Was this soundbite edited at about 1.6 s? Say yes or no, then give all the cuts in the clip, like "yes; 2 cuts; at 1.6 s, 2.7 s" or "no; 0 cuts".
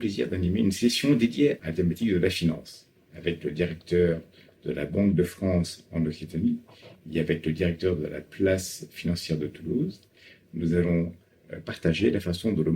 yes; 1 cut; at 1.6 s